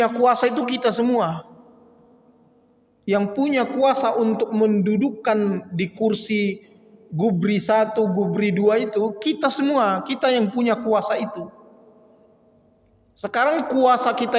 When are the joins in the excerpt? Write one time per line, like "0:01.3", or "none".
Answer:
none